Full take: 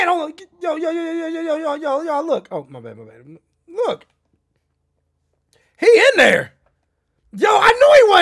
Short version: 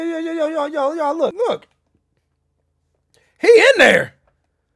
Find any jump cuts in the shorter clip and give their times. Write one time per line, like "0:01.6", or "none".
0:01.3